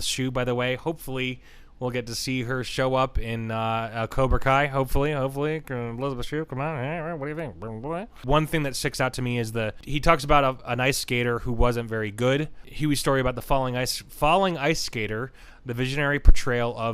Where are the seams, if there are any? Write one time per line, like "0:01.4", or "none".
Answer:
0:08.1
0:09.8
0:12.6